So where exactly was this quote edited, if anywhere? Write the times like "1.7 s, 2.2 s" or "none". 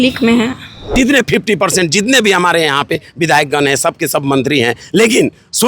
0.9 s